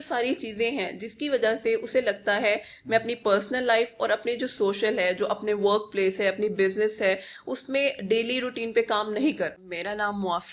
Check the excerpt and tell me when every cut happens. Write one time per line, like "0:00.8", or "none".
0:09.6